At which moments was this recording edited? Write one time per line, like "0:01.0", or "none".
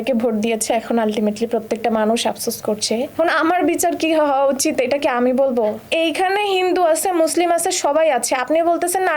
0:03.1
0:05.8

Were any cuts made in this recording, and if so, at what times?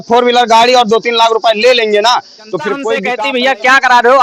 0:03.1

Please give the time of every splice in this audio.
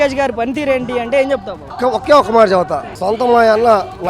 none

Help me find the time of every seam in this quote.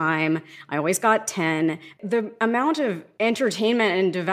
0:01.9
0:03.1

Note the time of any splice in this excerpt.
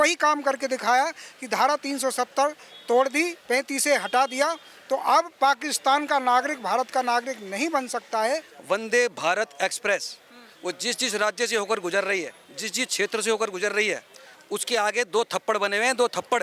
0:08.5

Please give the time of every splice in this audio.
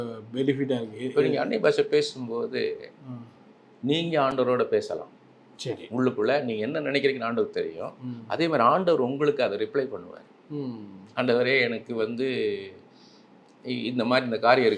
none

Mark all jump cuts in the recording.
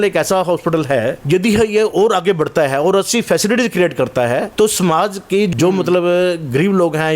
0:01.2
0:04.5
0:05.5

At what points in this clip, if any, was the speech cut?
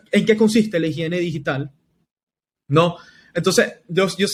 none

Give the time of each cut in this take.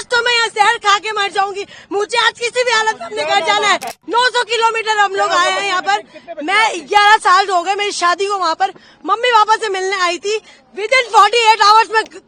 0:04.0

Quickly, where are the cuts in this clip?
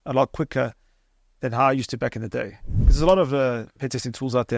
0:02.8

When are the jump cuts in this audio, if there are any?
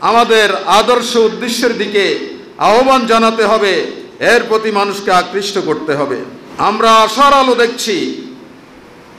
0:06.4

